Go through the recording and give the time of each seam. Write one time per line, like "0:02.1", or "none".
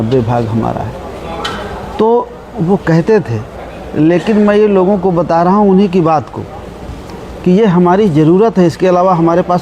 none

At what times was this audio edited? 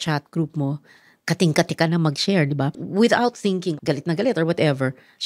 0:02.7
0:03.7

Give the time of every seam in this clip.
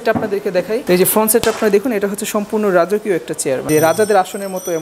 0:00.8
0:03.6

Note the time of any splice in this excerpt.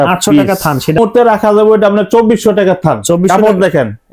0:01.0

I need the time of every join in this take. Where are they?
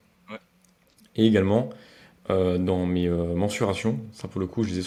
none

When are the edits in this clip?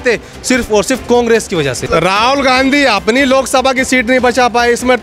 0:01.8

